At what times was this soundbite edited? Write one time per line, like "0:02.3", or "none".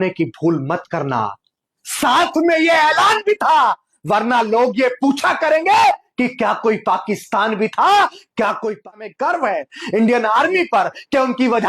0:09.0

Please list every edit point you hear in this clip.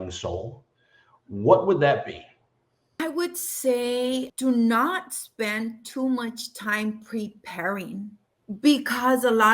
0:03.0
0:04.3
0:08.3

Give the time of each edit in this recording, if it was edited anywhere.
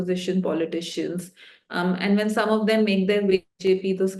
none

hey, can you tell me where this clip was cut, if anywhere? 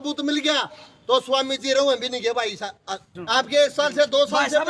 0:03.1

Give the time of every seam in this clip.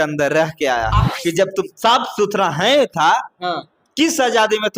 0:01.1

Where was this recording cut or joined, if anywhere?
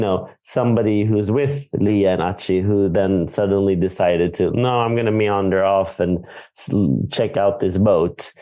none

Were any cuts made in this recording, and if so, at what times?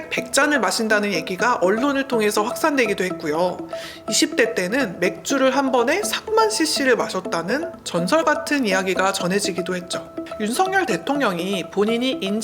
0:10.3

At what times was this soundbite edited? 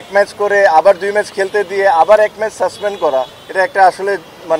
none

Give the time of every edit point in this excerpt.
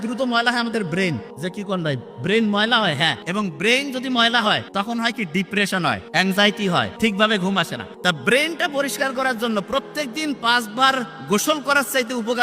0:01.3
0:03.2
0:04.7
0:06.0
0:06.9
0:07.8

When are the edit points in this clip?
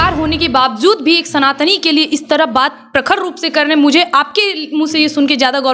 none

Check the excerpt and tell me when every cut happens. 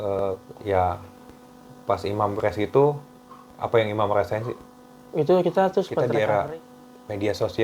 0:06.1

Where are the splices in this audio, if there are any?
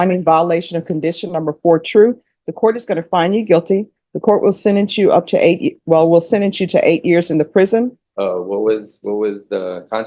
0:08.0

